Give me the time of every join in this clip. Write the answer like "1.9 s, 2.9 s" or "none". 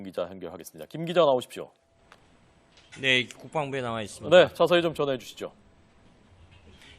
3.2 s